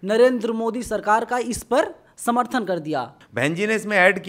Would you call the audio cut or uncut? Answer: cut